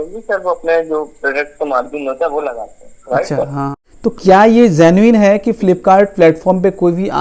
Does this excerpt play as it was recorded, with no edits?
no; 1 cut; at 3.8 s

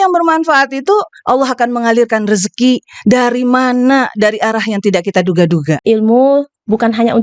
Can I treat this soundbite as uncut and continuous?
no; 1 cut; at 5.8 s

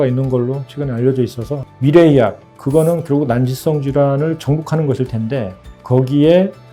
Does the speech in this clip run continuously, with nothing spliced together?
no; 1 cut; at 1.7 s

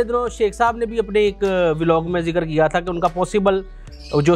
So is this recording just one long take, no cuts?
yes; 0 cuts

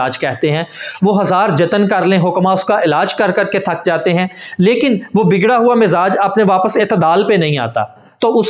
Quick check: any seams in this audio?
no; 0 cuts

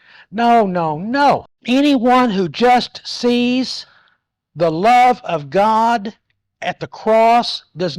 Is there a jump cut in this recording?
yes; 1 cut; at 1.5 s

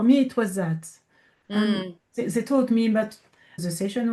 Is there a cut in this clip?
no; 0 cuts

